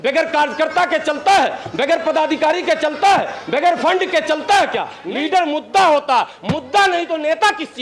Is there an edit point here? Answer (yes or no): yes